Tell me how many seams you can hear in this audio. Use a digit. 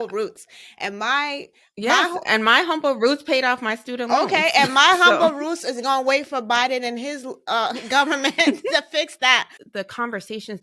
1